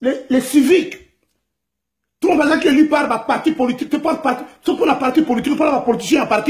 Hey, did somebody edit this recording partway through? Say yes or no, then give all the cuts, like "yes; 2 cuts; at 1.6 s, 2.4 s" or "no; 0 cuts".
no; 0 cuts